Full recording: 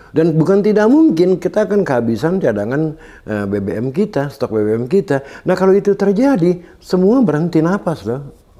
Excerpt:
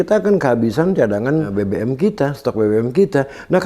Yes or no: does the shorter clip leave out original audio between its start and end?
yes